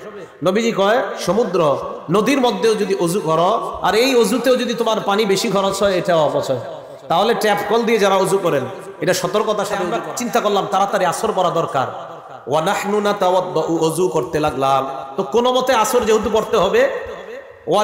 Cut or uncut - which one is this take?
cut